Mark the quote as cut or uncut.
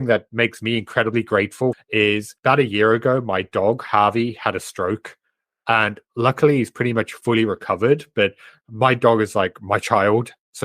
cut